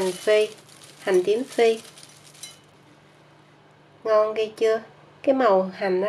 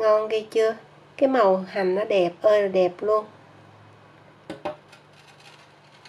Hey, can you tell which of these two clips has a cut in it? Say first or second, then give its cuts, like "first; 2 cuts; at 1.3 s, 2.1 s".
first; 1 cut; at 2.7 s